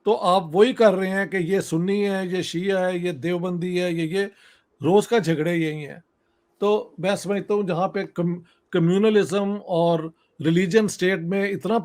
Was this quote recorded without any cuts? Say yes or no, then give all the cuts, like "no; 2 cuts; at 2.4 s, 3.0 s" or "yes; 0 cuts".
yes; 0 cuts